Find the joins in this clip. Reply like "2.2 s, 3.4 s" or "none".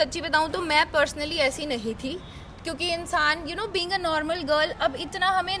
none